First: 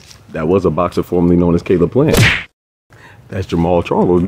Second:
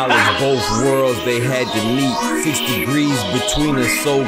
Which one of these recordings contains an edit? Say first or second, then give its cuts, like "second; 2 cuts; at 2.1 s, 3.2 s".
first; 1 cut; at 2.2 s